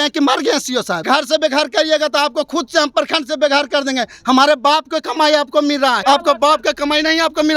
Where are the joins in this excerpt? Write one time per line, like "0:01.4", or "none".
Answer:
0:01.0
0:06.0